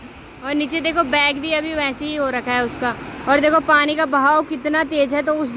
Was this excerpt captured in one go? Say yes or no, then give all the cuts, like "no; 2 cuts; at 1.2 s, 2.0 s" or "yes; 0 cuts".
yes; 0 cuts